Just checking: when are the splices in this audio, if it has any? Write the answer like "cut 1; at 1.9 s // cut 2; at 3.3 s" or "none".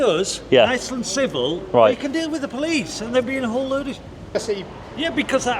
cut 1; at 4.4 s